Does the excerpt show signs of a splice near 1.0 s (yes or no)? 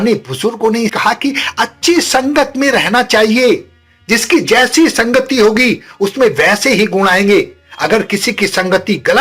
yes